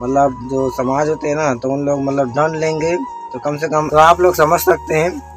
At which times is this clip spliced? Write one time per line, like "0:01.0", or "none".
0:03.9